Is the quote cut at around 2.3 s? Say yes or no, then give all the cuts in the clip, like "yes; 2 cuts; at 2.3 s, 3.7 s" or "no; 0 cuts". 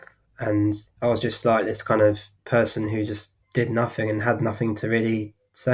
yes; 3 cuts; at 0.9 s, 2.3 s, 3.4 s